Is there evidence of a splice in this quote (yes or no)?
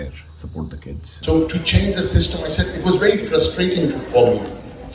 yes